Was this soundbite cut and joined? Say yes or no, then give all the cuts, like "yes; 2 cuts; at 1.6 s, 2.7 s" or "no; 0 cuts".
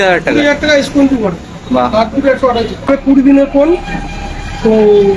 yes; 1 cut; at 2.9 s